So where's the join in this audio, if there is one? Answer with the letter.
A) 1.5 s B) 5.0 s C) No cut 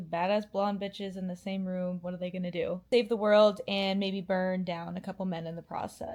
C